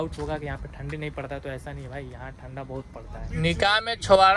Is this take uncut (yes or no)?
no